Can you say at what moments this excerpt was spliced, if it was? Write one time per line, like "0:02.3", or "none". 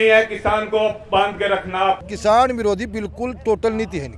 0:02.0